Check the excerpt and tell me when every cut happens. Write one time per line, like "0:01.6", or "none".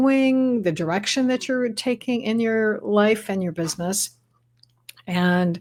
none